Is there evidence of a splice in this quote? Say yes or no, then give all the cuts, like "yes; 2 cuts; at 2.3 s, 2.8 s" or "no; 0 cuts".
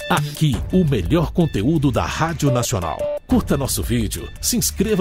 yes; 1 cut; at 3.0 s